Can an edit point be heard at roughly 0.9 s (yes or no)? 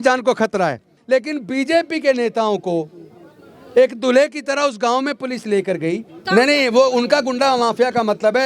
yes